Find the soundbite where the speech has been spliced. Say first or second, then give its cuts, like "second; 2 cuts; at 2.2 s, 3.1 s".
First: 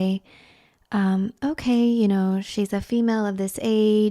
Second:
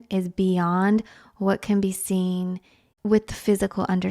second; 1 cut; at 2.9 s